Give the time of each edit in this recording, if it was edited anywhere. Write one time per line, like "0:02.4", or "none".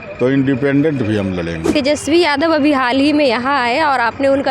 0:01.6